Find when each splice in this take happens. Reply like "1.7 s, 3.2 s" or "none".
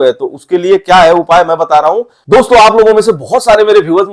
2.1 s